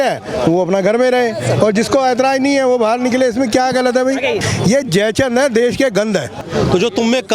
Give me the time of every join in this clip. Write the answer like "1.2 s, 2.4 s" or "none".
4.4 s, 6.4 s